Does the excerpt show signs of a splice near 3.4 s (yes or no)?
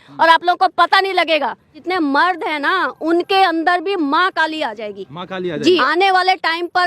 no